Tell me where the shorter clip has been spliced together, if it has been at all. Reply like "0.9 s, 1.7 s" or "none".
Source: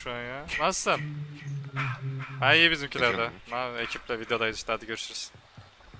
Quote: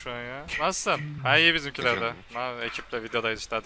1.1 s